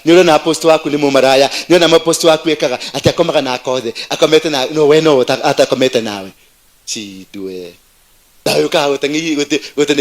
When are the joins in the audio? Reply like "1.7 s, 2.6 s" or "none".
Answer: 8.5 s